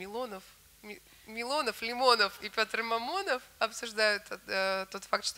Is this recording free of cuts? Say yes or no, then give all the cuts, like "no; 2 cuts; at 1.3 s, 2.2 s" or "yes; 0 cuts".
yes; 0 cuts